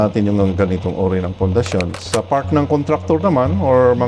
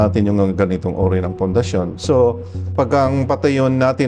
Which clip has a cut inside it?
first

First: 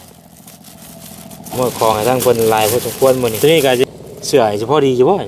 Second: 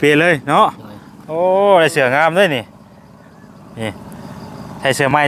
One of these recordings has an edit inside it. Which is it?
first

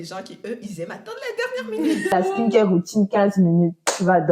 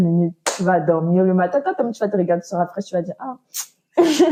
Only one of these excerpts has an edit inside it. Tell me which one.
first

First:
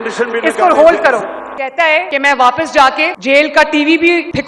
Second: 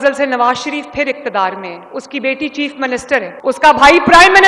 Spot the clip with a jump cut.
first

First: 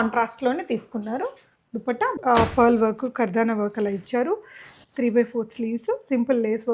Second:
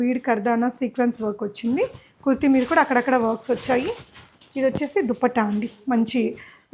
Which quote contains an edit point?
first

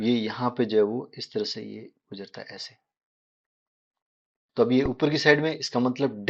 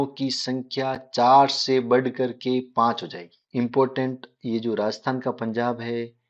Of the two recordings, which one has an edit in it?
second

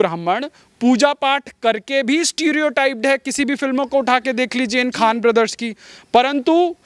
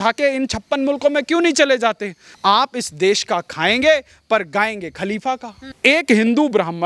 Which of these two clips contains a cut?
second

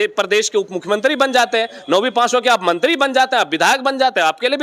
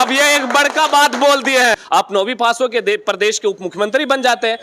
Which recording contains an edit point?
second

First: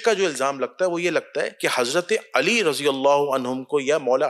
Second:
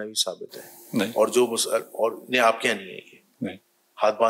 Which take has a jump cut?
first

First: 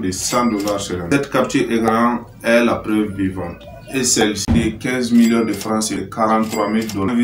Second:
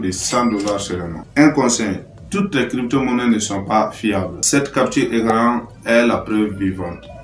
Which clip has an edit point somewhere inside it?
first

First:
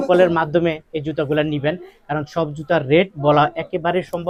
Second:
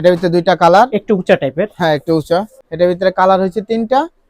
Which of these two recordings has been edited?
second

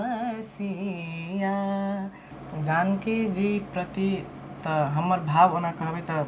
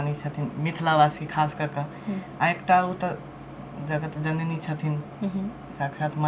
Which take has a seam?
first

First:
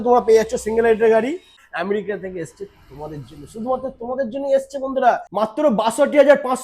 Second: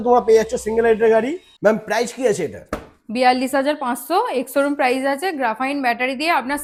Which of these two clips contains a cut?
first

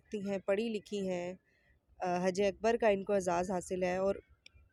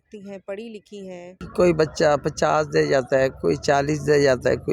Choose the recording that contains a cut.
second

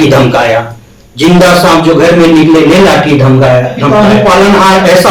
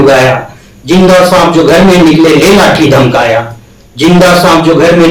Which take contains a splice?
first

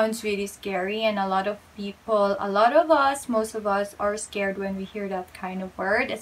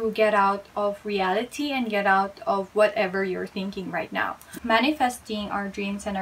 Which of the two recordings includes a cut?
second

